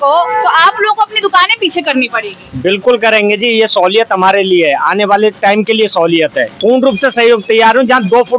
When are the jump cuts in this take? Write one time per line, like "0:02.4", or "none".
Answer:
0:06.5